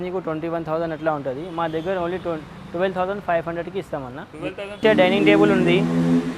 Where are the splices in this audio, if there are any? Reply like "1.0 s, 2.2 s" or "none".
4.8 s

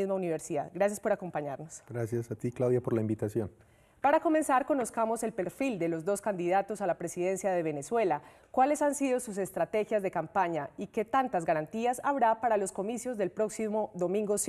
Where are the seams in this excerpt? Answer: none

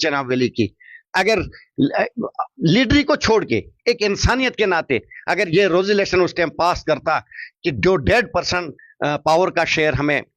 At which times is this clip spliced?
none

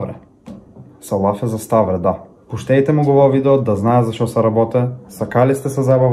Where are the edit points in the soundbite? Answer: none

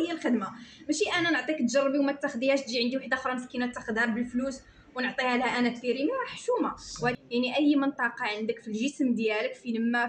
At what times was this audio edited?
7.2 s

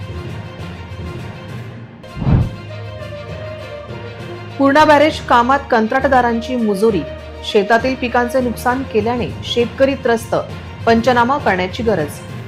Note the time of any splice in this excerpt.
none

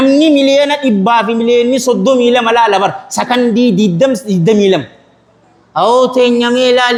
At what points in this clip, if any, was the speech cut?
none

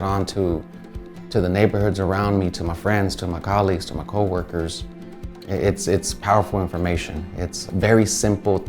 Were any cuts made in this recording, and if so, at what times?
7.6 s

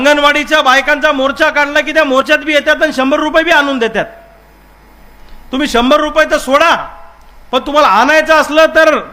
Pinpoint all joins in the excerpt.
none

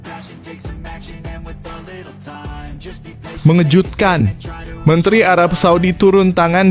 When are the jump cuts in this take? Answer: 3.4 s

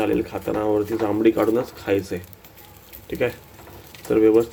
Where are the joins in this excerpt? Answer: none

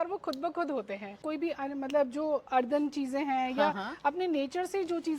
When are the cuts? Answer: 1.2 s

